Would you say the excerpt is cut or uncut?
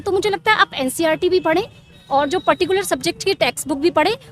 uncut